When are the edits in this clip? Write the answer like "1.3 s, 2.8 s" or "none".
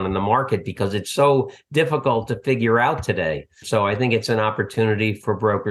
3.5 s